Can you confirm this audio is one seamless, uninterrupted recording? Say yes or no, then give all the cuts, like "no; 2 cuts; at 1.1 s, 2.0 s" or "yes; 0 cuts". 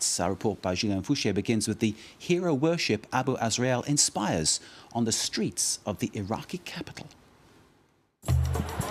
yes; 0 cuts